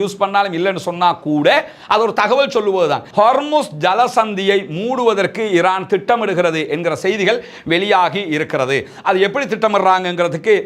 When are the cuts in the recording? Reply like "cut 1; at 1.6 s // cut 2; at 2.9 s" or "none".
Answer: cut 1; at 3.0 s